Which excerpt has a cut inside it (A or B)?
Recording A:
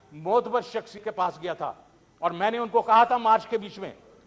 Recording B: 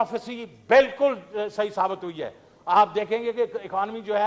A